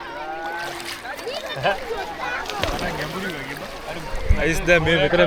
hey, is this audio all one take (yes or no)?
yes